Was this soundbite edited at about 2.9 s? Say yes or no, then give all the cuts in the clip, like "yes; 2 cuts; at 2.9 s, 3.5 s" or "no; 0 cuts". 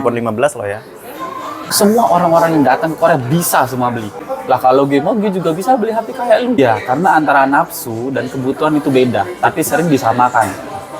no; 3 cuts; at 1.7 s, 4.3 s, 6.6 s